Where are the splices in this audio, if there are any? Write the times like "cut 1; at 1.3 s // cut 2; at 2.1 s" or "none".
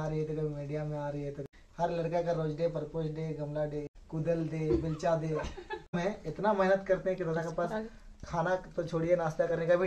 cut 1; at 1.4 s // cut 2; at 3.9 s // cut 3; at 6.0 s